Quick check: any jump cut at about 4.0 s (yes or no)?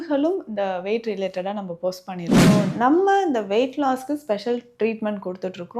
no